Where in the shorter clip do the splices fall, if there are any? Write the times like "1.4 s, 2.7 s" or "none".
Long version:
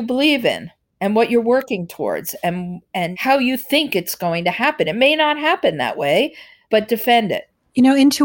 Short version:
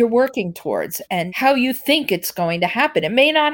1.0 s